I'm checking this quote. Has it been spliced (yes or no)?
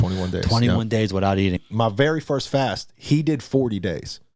yes